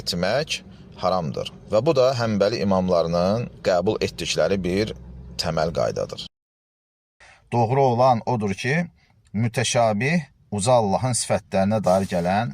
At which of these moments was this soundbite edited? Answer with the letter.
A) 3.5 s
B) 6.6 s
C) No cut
B